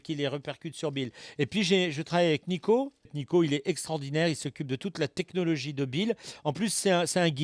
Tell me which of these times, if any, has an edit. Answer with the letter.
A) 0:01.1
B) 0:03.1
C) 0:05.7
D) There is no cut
D